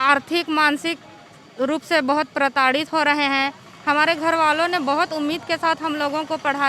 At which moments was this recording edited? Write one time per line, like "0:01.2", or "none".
none